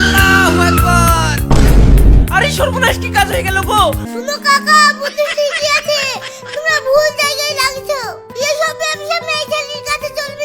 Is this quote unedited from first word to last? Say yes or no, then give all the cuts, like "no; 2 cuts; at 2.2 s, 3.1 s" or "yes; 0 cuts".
no; 2 cuts; at 4.0 s, 8.3 s